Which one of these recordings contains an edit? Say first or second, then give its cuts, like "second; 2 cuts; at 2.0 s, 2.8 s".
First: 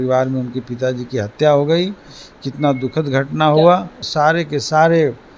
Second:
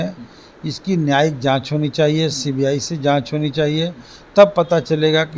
first; 1 cut; at 4.0 s